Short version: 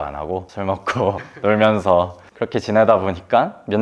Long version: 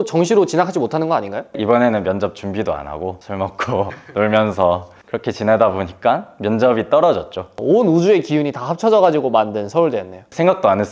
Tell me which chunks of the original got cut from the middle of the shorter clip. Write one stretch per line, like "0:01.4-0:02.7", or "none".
none